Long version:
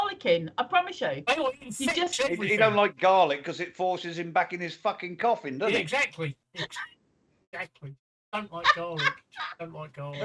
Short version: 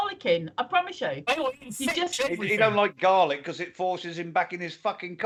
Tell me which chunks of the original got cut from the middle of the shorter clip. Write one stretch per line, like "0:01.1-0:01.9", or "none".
none